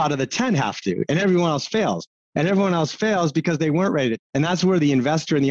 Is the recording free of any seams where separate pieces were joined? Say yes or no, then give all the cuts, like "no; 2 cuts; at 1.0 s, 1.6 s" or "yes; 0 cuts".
no; 1 cut; at 4.2 s